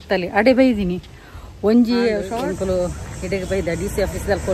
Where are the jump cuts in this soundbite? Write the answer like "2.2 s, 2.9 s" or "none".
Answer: 2.2 s